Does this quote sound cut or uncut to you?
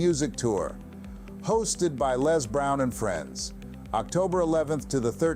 cut